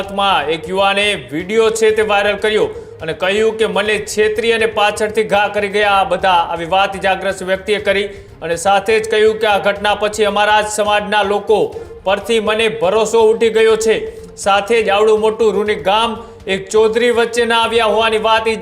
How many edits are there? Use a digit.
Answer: 0